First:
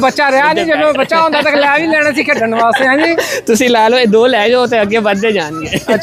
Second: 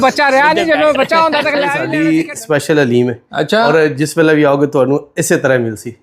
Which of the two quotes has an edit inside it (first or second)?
second